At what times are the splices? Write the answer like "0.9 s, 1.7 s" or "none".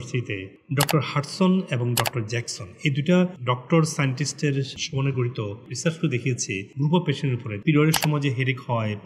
5.6 s, 6.7 s